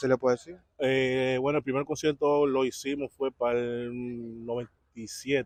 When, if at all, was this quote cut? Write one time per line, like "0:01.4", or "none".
none